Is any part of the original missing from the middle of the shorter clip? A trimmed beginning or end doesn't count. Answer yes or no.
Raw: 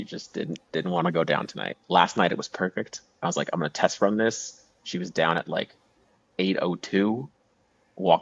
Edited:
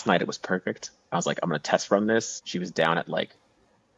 yes